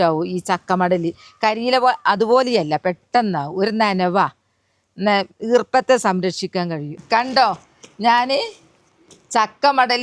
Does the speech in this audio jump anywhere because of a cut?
yes; 1 cut; at 7.0 s

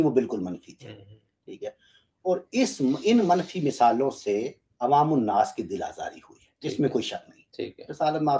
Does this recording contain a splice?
no; 0 cuts

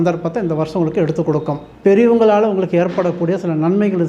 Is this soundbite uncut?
no; 1 cut; at 1.6 s

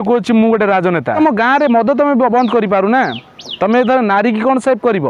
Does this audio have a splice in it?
yes; 1 cut; at 1.2 s

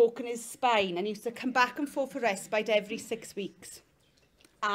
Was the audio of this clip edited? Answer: no; 0 cuts

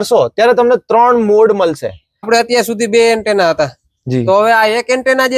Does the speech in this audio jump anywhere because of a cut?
yes; 1 cut; at 2.1 s

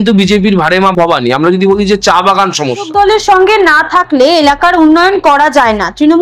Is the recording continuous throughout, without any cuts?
no; 1 cut; at 2.8 s

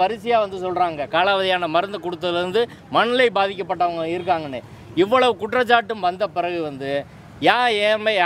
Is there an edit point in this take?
no; 0 cuts

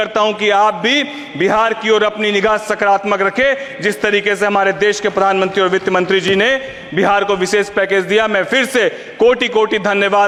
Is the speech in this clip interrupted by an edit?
no; 0 cuts

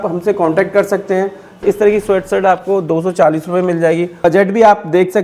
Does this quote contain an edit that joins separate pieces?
yes; 2 cuts; at 1.6 s, 4.2 s

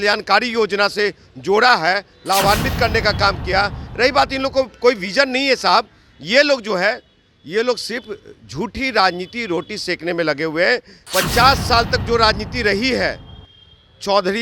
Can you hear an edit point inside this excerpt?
yes; 1 cut; at 11.0 s

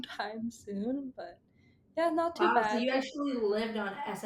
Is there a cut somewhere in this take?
no; 0 cuts

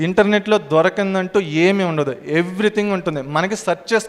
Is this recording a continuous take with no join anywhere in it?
yes; 0 cuts

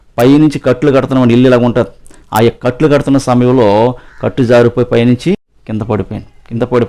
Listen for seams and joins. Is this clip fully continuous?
yes; 0 cuts

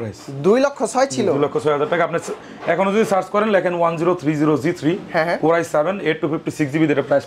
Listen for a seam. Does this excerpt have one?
no; 0 cuts

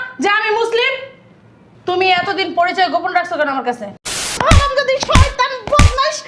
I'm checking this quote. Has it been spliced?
yes; 1 cut; at 4.3 s

